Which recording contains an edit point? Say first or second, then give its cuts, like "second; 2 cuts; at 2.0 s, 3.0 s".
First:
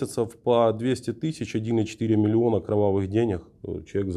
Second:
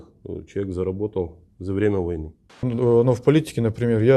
second; 1 cut; at 2.7 s